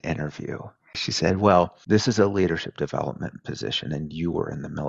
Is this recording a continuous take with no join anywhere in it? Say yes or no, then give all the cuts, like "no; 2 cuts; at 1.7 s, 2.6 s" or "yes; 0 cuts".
no; 2 cuts; at 1.0 s, 1.8 s